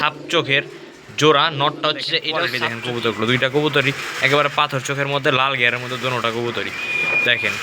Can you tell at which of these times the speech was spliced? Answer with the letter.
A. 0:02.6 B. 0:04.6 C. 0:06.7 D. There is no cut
A